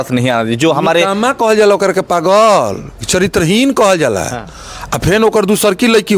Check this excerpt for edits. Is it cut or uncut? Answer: uncut